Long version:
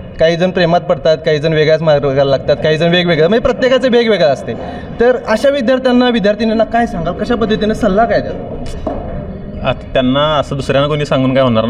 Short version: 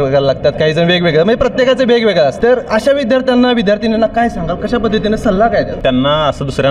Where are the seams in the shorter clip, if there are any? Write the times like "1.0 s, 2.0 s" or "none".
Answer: 2.4 s, 5.7 s